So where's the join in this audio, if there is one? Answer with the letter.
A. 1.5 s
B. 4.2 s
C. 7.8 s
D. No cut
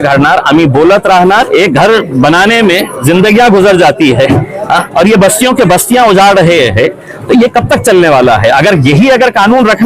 A